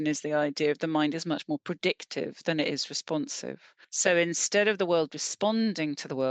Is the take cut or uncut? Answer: cut